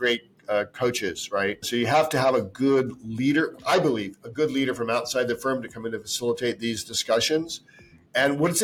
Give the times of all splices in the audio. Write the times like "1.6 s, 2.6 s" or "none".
1.6 s

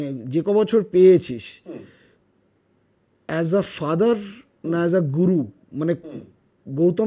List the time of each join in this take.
none

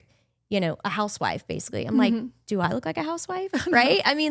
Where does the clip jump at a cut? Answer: none

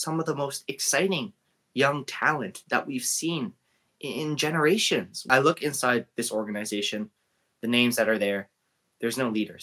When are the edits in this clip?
5.1 s

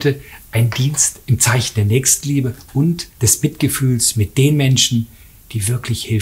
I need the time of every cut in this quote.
3.1 s

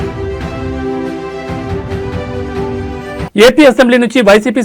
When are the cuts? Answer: 3.3 s

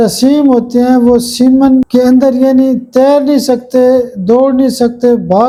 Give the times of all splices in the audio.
none

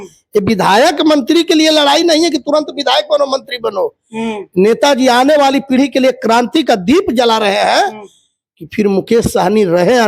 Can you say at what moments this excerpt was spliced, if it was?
none

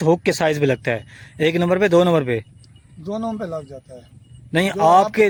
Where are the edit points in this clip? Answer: none

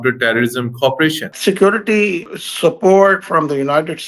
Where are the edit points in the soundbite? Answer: 1.3 s, 2.2 s

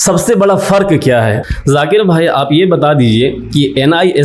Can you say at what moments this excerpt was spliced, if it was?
1.4 s

